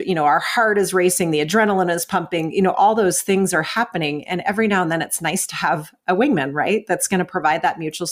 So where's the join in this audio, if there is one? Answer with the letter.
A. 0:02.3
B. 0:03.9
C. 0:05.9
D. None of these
D